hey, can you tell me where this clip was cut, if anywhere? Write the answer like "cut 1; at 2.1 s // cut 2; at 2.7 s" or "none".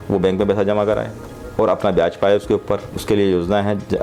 none